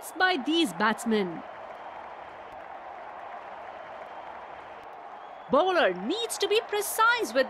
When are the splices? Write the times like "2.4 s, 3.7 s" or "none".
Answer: 1.4 s, 5.5 s